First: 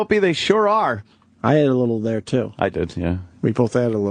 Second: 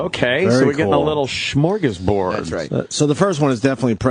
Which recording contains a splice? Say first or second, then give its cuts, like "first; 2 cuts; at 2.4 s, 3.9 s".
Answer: first; 1 cut; at 2.1 s